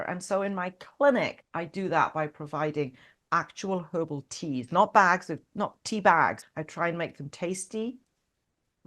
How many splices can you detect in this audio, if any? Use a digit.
2